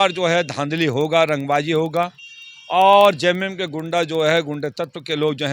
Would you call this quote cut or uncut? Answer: uncut